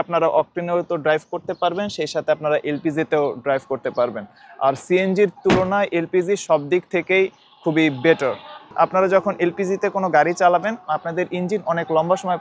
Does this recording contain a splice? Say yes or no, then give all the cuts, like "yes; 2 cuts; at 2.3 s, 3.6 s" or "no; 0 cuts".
no; 0 cuts